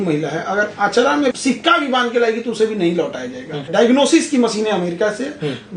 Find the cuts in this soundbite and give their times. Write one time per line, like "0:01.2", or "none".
0:01.3
0:03.7